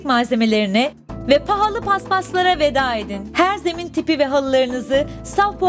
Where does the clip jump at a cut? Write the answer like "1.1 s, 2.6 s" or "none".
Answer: none